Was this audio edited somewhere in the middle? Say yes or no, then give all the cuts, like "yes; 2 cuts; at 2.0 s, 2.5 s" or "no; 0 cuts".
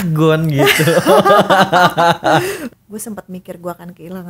yes; 1 cut; at 2.6 s